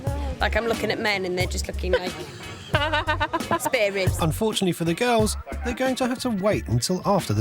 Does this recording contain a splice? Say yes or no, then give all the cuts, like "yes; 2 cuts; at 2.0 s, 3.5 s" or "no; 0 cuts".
yes; 1 cut; at 4.1 s